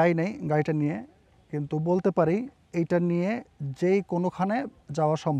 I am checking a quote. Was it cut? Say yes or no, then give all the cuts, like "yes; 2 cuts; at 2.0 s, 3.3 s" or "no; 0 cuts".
no; 0 cuts